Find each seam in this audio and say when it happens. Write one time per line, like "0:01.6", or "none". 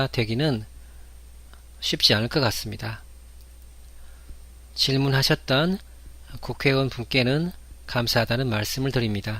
0:01.5